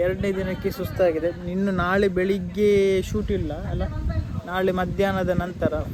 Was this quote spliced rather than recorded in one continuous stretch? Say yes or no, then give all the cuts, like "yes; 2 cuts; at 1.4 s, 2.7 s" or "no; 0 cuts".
no; 0 cuts